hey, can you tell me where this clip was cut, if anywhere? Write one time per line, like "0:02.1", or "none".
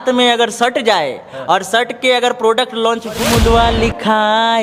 0:03.2